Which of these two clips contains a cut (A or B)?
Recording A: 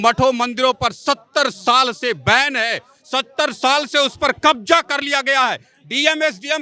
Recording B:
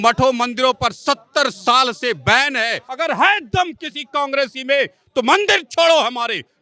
B